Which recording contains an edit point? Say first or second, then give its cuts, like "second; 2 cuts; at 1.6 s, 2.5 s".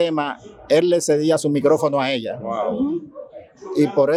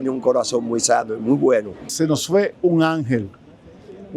second; 1 cut; at 1.8 s